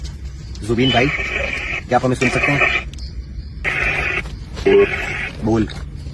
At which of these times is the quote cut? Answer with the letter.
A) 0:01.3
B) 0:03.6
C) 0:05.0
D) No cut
B